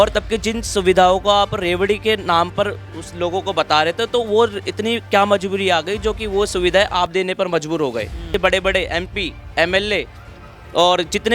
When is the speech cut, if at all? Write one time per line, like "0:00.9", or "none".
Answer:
0:08.3